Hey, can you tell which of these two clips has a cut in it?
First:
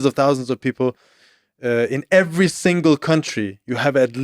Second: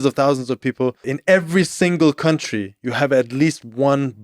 second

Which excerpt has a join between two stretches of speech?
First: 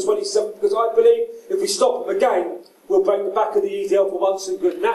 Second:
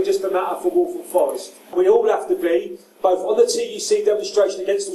second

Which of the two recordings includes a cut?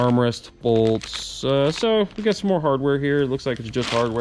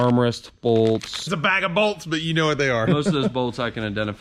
second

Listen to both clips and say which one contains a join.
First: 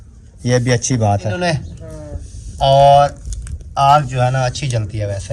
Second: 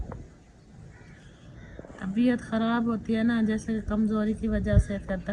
first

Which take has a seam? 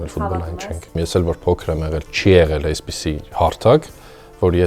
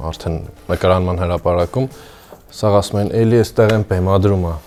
first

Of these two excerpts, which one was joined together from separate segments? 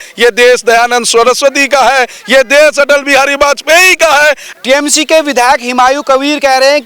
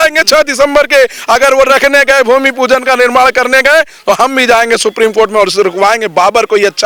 first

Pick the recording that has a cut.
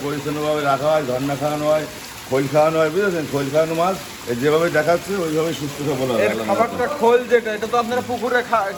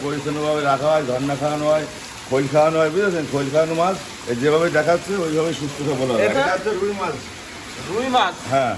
second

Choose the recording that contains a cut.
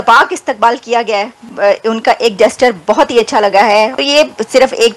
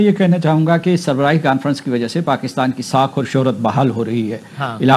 first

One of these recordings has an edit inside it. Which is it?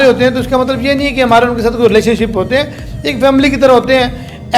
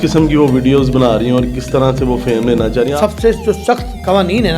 second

